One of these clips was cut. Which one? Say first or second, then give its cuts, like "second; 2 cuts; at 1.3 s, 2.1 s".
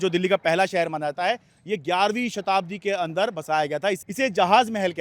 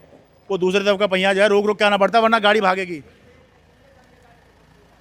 first; 1 cut; at 4.0 s